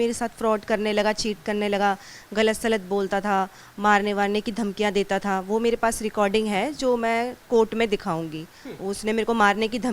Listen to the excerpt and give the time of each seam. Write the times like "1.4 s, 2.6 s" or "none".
none